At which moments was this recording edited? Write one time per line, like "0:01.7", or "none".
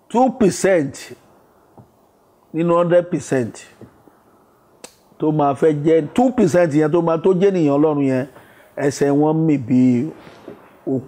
none